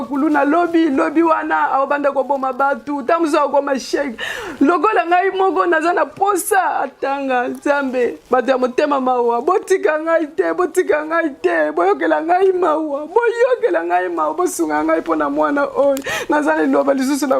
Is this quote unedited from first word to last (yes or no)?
yes